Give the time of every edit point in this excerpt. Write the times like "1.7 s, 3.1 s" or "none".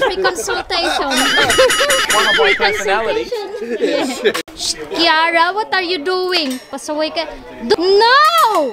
4.5 s, 7.7 s